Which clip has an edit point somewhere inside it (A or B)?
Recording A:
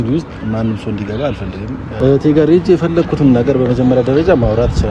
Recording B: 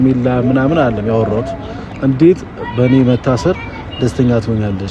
A